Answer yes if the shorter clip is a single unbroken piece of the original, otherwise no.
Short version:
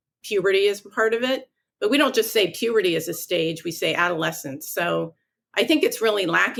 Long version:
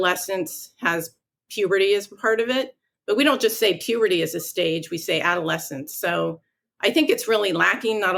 yes